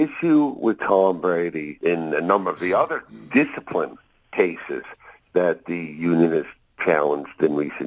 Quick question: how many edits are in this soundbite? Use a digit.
1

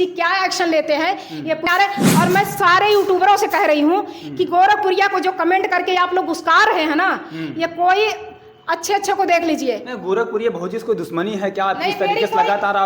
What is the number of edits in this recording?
1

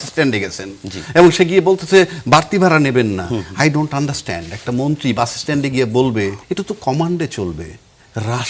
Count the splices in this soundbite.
1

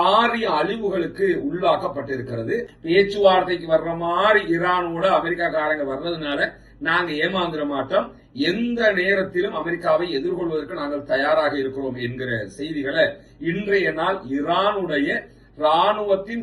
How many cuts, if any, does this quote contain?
1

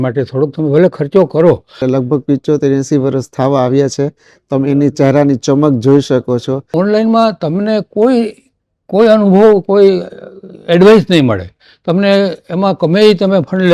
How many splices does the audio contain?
2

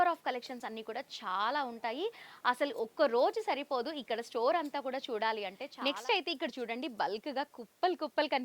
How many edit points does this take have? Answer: 1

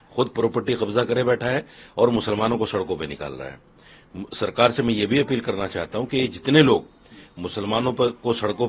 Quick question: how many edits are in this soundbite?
0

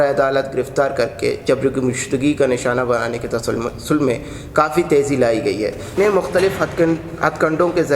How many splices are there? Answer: 1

